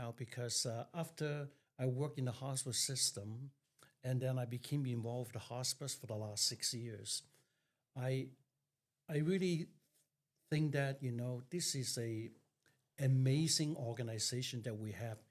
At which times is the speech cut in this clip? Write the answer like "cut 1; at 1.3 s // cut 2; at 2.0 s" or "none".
none